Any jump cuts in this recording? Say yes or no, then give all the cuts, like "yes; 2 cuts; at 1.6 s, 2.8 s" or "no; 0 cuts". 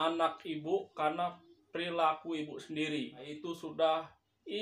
yes; 1 cut; at 3.3 s